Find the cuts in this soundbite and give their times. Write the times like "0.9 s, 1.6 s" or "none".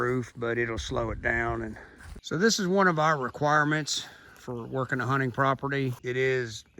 2.1 s, 6.0 s

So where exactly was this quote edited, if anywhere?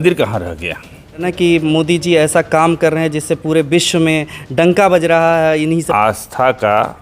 1.3 s, 5.9 s

